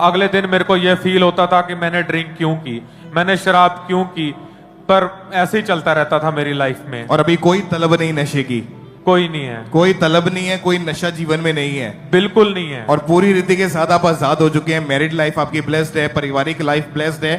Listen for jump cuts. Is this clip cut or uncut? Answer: uncut